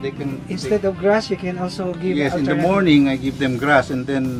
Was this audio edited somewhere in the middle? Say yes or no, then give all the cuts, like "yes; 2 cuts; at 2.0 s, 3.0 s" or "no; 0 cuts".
no; 0 cuts